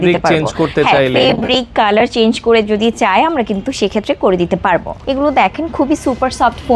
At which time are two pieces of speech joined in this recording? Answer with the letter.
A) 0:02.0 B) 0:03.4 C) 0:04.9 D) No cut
C